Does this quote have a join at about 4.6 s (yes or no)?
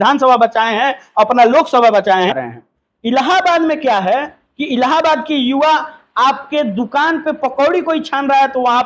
no